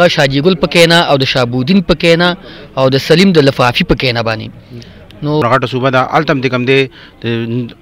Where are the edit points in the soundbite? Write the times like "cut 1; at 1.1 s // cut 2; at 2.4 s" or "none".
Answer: cut 1; at 5.4 s